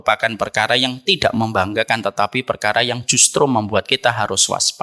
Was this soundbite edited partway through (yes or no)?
no